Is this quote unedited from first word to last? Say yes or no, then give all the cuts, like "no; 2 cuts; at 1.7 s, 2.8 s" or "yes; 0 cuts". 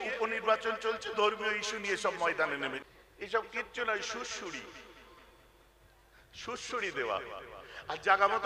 no; 1 cut; at 2.8 s